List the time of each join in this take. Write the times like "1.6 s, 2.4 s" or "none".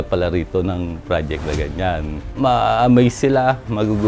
2.3 s

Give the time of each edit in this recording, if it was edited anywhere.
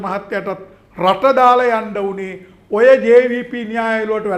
none

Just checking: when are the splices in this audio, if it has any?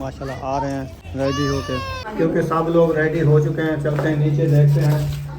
1.0 s, 2.0 s

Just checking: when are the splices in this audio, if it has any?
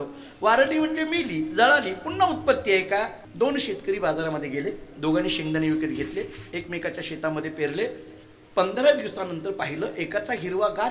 3.2 s

